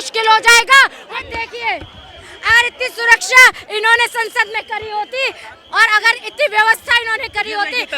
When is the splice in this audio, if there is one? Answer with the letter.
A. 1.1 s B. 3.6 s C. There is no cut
A